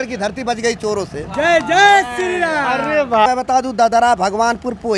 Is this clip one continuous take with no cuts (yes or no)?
no